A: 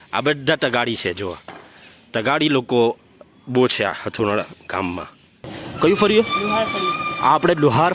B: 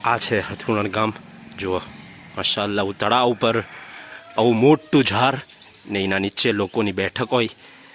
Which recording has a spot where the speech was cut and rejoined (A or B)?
A